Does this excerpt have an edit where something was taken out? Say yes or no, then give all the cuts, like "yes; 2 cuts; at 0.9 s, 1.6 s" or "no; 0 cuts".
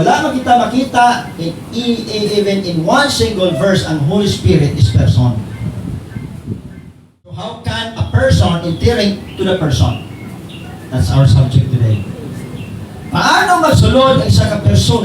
yes; 1 cut; at 7.4 s